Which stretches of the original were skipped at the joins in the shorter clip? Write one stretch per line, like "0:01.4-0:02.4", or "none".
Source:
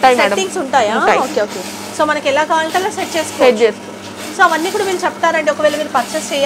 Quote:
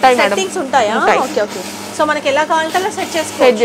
none